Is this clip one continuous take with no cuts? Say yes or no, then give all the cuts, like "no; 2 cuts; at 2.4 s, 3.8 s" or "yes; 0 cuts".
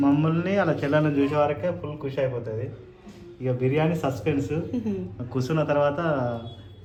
yes; 0 cuts